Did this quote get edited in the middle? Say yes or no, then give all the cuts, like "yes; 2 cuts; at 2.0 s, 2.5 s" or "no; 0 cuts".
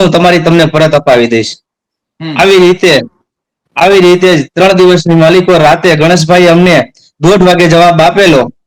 no; 0 cuts